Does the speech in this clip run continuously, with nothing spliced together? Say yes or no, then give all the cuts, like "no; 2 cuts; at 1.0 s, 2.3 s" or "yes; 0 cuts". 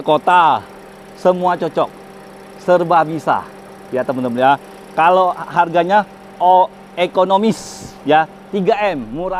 yes; 0 cuts